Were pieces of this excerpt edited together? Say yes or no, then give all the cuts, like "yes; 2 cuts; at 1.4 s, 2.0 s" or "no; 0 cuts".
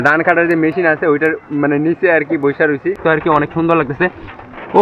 yes; 1 cut; at 3.0 s